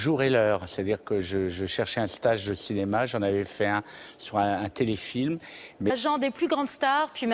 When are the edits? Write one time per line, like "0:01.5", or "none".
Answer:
none